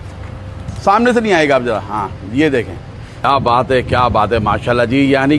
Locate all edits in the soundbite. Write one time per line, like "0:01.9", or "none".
0:03.2